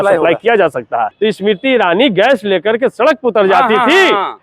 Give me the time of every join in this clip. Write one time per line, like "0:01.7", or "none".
0:01.1